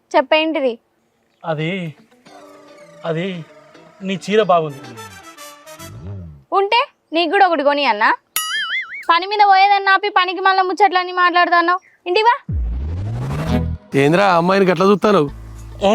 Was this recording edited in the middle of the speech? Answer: yes; 1 cut; at 13.8 s

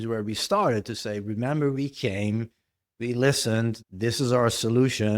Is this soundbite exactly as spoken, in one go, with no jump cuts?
no; 1 cut; at 3.8 s

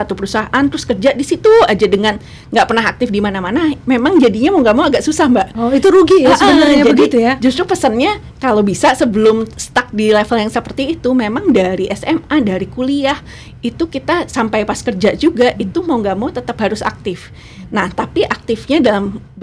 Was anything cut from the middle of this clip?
no; 0 cuts

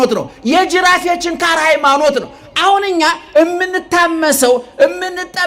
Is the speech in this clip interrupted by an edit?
no; 0 cuts

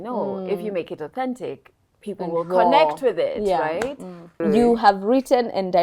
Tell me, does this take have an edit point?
yes; 1 cut; at 4.4 s

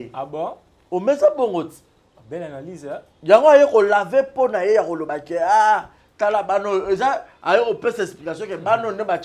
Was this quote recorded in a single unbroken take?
yes; 0 cuts

